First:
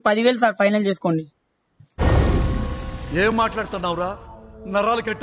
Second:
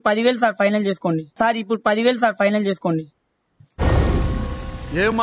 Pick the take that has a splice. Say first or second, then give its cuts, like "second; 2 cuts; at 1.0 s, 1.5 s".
first; 1 cut; at 1.2 s